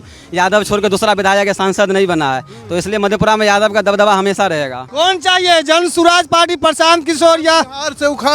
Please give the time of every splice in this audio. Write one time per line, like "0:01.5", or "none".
0:04.8